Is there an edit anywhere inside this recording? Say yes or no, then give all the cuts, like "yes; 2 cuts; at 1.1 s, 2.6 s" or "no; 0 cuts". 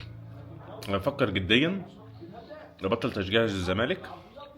no; 0 cuts